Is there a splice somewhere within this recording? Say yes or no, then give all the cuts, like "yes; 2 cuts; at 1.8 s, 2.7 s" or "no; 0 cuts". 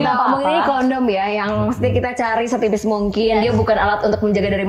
no; 0 cuts